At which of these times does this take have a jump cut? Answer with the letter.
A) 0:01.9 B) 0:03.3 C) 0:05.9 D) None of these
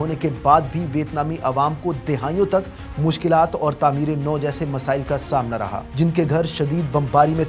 C